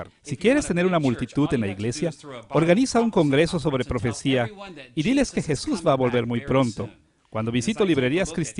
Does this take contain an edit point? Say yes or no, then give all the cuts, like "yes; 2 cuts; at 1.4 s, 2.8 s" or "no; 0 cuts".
no; 0 cuts